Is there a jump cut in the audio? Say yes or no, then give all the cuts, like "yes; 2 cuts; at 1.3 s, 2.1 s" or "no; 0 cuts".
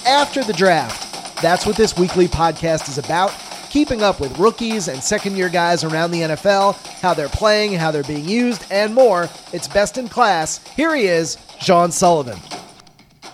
yes; 1 cut; at 12.4 s